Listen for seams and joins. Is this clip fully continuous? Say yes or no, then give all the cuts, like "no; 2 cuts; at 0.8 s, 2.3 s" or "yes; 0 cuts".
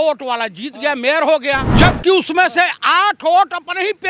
no; 1 cut; at 1.7 s